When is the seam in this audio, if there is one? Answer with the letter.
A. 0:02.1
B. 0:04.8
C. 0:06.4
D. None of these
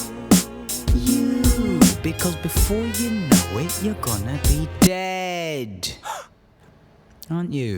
C